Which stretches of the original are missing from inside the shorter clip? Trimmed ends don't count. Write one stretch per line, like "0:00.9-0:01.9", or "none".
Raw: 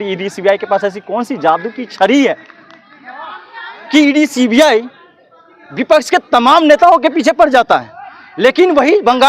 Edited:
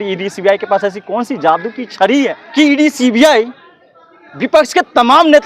0:02.4-0:03.8